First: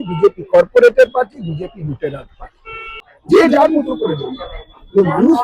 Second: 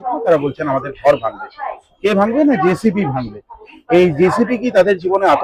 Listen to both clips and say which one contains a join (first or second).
first